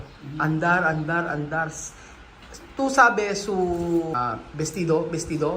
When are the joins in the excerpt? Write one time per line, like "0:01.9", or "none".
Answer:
0:04.2